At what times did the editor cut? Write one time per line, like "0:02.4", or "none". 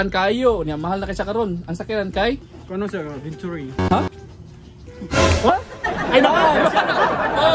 0:02.5